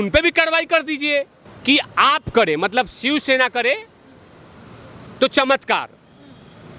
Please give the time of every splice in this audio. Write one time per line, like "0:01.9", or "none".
0:01.4